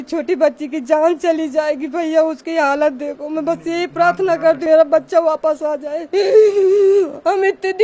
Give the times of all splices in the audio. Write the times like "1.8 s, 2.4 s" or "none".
4.6 s